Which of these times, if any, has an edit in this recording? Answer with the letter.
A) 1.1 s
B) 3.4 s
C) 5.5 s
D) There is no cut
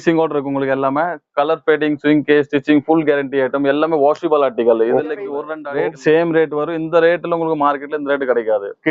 C